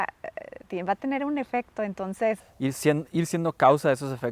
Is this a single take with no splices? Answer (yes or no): no